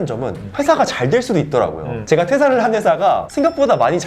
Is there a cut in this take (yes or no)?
no